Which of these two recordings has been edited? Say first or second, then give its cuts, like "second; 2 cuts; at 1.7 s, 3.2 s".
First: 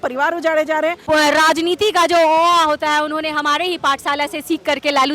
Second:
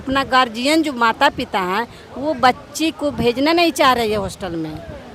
first; 1 cut; at 1.0 s